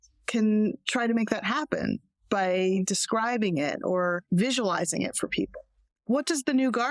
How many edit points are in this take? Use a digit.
1